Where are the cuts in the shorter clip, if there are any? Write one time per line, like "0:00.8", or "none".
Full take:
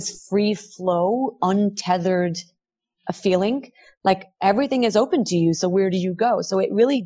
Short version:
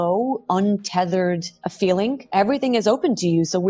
0:01.6
0:02.2